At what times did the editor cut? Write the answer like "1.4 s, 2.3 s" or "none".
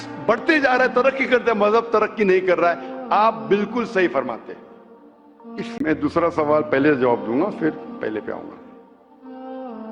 5.8 s